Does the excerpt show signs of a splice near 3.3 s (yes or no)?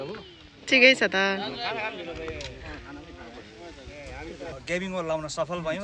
no